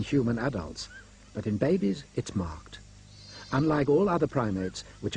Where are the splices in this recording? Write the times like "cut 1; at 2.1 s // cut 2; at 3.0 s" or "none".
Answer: cut 1; at 1.8 s